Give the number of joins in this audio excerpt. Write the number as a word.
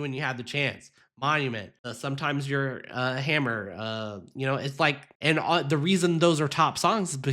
two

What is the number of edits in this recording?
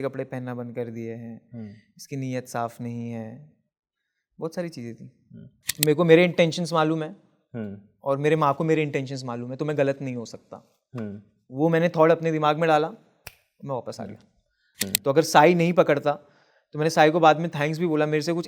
two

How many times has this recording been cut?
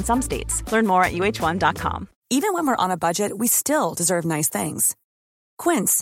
one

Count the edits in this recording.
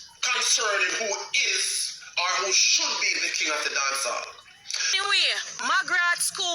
one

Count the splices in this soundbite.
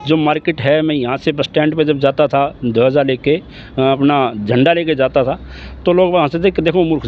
zero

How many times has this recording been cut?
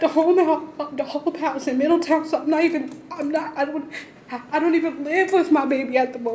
zero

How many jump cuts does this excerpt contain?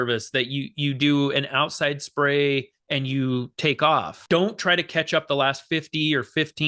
one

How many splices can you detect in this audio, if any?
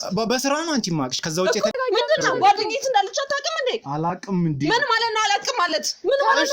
one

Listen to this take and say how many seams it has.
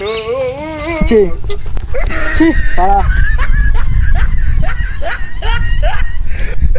zero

